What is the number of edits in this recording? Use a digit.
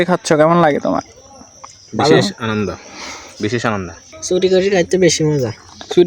1